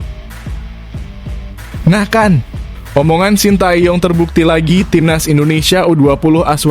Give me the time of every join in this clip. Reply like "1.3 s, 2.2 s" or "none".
1.8 s